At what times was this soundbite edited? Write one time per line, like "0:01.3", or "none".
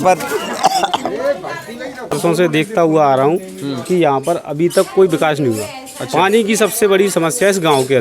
0:02.2